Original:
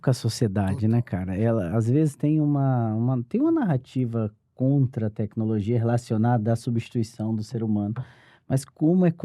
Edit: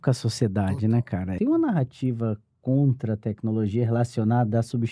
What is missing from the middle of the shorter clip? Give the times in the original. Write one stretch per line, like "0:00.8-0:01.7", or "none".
0:01.3-0:03.3

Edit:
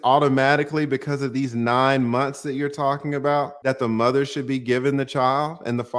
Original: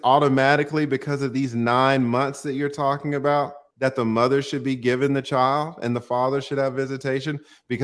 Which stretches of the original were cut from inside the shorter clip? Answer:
0:03.5-0:03.7

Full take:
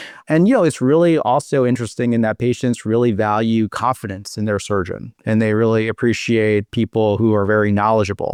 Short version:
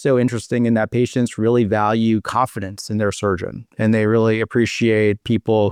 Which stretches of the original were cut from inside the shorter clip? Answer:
none

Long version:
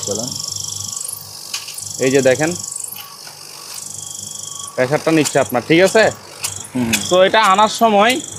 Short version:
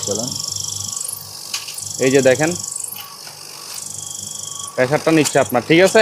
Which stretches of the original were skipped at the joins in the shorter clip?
none

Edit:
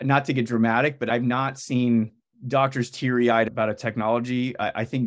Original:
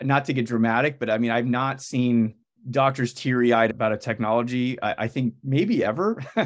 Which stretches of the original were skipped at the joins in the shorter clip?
0:01.1-0:01.3

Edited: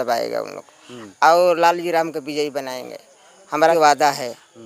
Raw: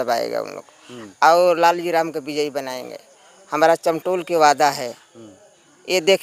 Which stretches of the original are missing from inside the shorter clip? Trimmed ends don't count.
0:03.7-0:04.3

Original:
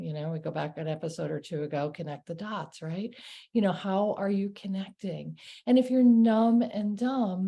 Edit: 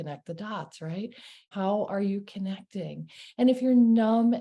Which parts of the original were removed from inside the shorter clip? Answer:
0:03.5-0:03.8

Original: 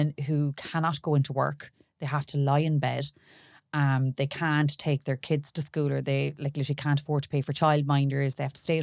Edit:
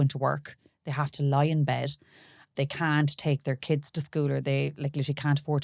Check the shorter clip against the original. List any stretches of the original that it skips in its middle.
0:03.6-0:04.1

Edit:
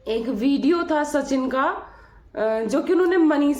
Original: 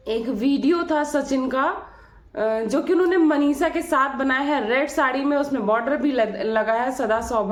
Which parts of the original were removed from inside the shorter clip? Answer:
none

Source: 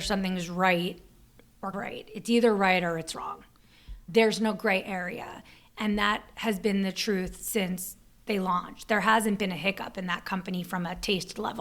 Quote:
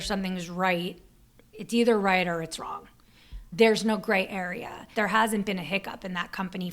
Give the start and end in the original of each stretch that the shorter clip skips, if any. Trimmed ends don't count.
0:01.5-0:02.0
0:05.4-0:08.7

